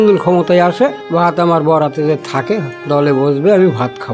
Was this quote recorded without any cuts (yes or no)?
no